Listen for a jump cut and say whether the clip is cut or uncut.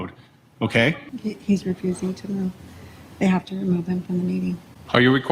cut